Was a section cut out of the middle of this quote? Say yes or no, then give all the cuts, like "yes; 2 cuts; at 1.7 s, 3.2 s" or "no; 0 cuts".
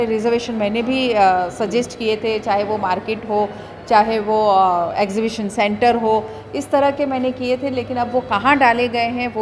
no; 0 cuts